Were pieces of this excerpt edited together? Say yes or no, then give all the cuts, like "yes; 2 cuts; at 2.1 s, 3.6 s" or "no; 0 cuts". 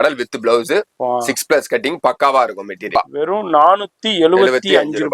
yes; 1 cut; at 2.9 s